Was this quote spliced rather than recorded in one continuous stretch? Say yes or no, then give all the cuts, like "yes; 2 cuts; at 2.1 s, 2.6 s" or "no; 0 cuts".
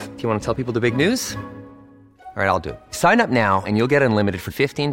no; 0 cuts